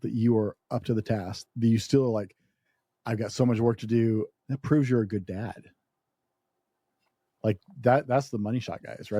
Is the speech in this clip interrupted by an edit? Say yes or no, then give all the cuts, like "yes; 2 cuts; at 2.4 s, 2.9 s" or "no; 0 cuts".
yes; 2 cuts; at 1.4 s, 4.4 s